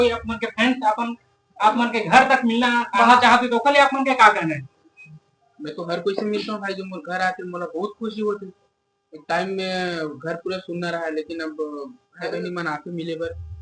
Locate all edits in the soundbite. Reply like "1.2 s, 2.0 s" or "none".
none